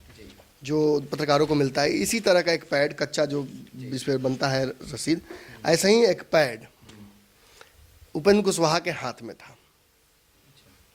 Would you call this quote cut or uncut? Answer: uncut